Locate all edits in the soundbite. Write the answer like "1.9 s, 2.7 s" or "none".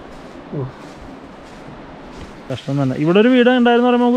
2.4 s